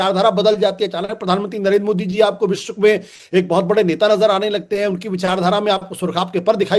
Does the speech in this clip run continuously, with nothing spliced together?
no; 1 cut; at 1.4 s

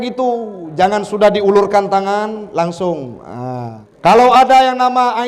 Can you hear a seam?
yes; 1 cut; at 3.8 s

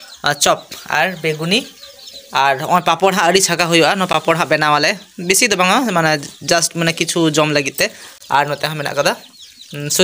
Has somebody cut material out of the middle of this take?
no; 0 cuts

